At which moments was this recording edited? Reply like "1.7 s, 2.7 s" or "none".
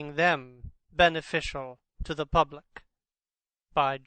2.4 s